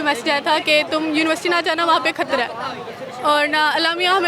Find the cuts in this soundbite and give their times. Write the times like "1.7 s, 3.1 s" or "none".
none